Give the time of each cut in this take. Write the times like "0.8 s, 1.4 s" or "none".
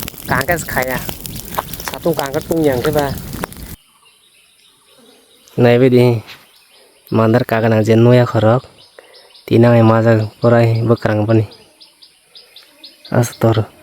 3.7 s